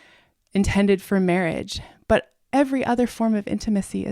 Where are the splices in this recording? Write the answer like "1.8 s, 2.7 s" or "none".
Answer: 2.4 s